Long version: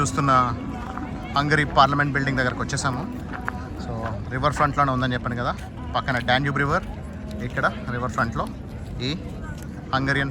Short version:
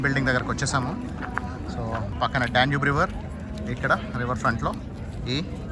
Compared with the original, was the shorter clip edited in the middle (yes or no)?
yes